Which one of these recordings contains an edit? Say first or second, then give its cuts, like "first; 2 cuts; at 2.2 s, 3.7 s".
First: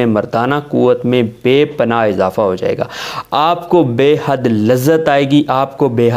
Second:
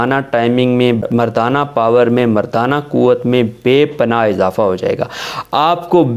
second; 1 cut; at 1.0 s